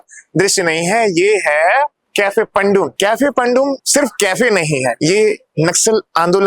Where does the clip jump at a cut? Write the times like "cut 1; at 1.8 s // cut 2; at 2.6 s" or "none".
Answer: cut 1; at 2.0 s // cut 2; at 2.9 s // cut 3; at 3.8 s // cut 4; at 5.0 s